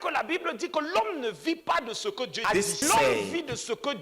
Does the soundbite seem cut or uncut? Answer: cut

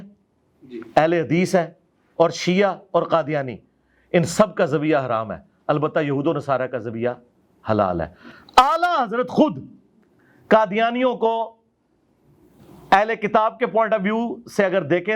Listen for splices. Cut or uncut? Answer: uncut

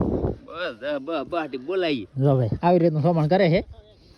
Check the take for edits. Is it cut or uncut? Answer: uncut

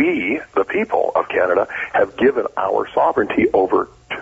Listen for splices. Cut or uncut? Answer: uncut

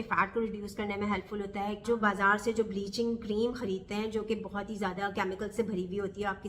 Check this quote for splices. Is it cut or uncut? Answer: cut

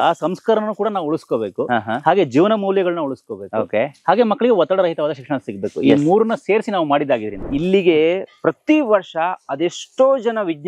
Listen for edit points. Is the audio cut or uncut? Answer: cut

